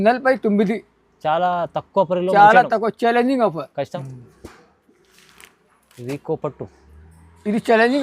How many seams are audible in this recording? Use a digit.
1